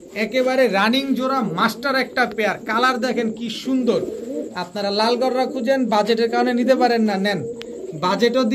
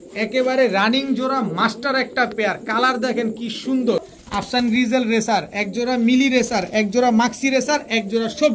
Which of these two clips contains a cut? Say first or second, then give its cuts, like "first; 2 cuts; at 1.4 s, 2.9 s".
second; 1 cut; at 4.1 s